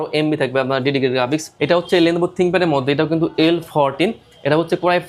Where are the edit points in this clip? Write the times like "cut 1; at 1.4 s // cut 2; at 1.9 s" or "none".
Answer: cut 1; at 1.7 s